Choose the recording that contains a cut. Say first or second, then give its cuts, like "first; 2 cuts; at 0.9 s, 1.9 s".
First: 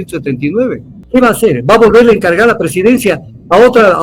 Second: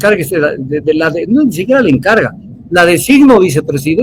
first; 1 cut; at 0.9 s